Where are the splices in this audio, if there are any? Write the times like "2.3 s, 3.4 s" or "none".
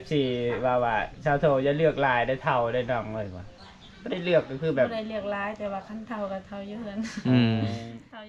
none